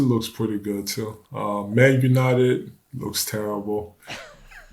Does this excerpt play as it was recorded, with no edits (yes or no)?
yes